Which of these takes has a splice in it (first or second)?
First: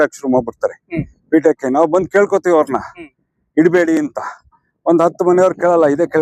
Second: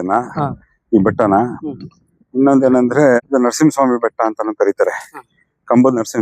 second